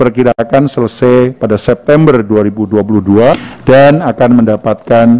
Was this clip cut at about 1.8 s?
no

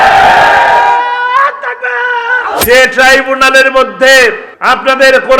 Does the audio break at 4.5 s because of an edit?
yes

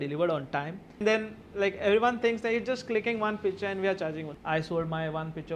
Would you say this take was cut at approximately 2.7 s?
no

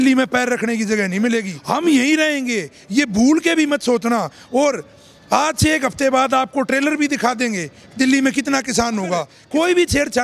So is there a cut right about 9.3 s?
yes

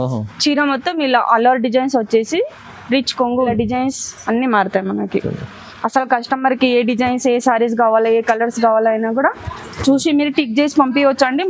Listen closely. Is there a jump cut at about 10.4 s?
no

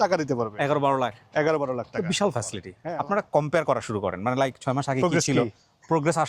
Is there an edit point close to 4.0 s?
no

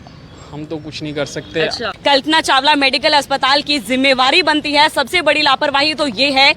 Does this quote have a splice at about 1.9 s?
yes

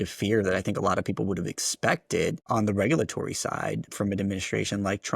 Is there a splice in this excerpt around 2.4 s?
yes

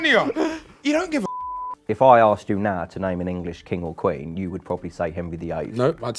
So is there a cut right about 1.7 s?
yes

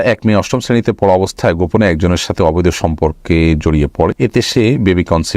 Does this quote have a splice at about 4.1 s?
yes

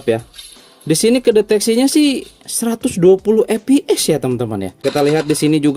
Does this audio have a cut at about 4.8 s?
yes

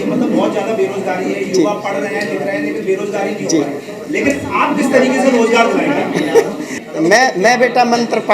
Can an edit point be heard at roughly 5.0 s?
no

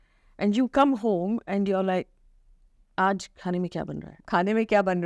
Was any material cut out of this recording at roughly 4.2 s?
yes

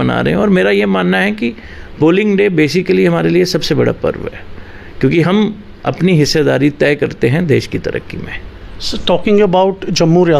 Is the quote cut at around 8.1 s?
no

